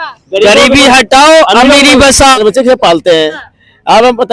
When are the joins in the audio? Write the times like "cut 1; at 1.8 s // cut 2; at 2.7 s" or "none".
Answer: cut 1; at 2.4 s

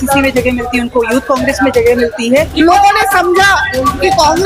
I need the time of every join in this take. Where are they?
cut 1; at 2.5 s

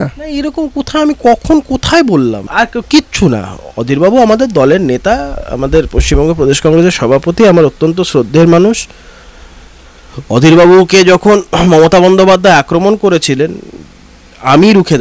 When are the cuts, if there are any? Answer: cut 1; at 2.5 s

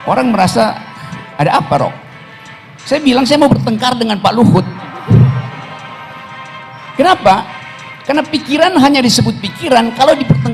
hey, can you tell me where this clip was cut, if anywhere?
none

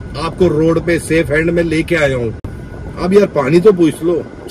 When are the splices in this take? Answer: none

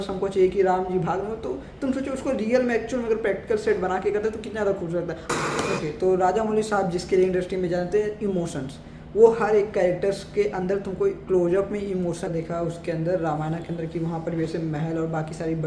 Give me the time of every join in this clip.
cut 1; at 5.2 s // cut 2; at 12.3 s

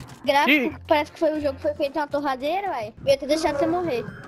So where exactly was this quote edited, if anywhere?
cut 1; at 2.9 s

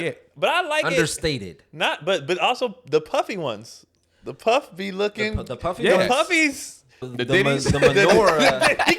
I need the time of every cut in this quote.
cut 1; at 7.1 s

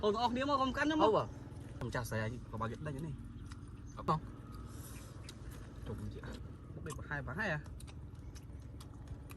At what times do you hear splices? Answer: cut 1; at 1.8 s // cut 2; at 4.1 s // cut 3; at 6.4 s

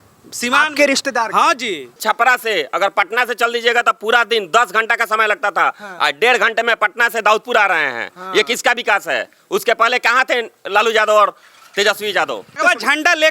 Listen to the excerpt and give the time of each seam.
cut 1; at 1.9 s // cut 2; at 12.6 s

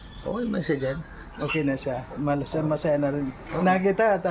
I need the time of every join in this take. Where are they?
none

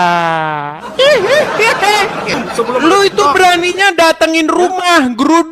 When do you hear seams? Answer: cut 1; at 2.3 s

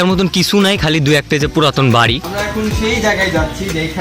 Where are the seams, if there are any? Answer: cut 1; at 2.2 s

